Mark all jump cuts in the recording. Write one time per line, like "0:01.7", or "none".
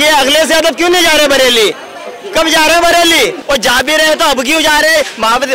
0:03.4